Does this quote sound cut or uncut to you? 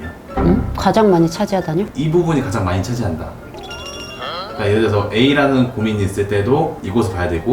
cut